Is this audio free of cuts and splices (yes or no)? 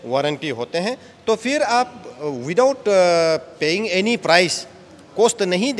yes